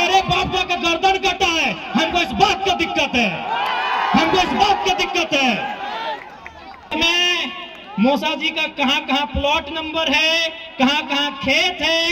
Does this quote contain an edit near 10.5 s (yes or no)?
no